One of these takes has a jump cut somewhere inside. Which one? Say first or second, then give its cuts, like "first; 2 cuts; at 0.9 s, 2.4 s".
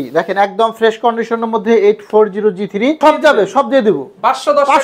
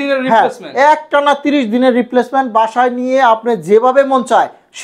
first; 1 cut; at 3.0 s